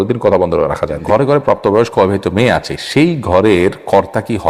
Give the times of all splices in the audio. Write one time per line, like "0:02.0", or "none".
0:01.0